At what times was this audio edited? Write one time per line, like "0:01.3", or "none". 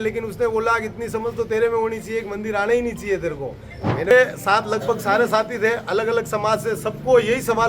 0:04.1